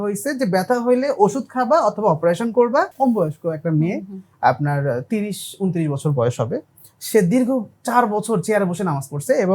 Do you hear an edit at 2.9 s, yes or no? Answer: yes